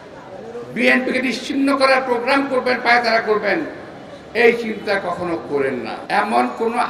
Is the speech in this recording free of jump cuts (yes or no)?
no